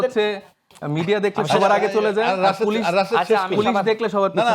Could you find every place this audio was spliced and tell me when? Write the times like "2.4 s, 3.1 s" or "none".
none